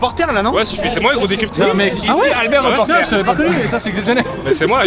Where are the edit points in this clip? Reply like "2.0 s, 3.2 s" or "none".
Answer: none